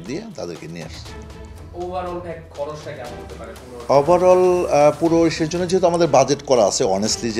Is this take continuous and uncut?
yes; 0 cuts

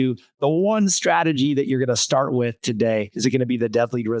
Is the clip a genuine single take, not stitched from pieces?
no; 1 cut; at 3.1 s

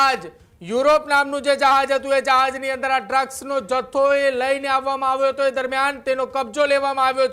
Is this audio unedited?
yes; 0 cuts

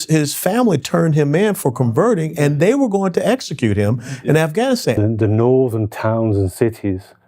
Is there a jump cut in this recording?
yes; 1 cut; at 5.0 s

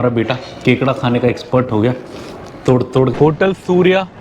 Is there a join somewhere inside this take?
yes; 1 cut; at 3.1 s

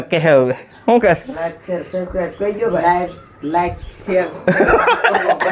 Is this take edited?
no; 0 cuts

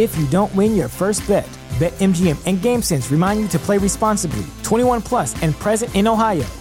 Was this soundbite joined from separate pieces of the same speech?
no; 0 cuts

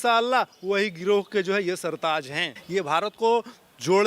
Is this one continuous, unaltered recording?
no; 1 cut; at 2.6 s

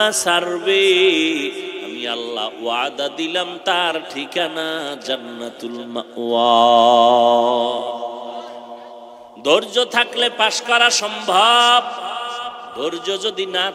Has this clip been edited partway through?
yes; 1 cut; at 9.2 s

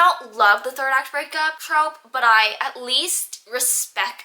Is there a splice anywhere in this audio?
yes; 1 cut; at 1.6 s

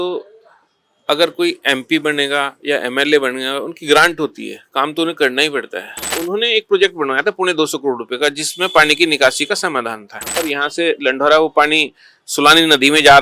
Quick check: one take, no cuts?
no; 2 cuts; at 6.1 s, 10.4 s

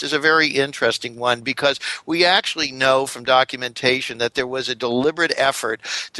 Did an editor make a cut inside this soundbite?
no; 0 cuts

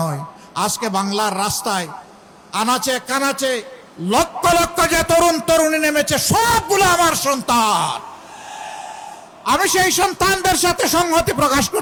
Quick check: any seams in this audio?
no; 0 cuts

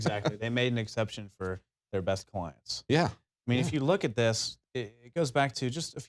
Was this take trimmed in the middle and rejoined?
no; 0 cuts

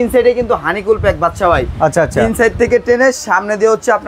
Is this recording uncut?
yes; 0 cuts

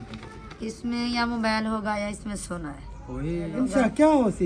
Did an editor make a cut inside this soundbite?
yes; 1 cut; at 3.5 s

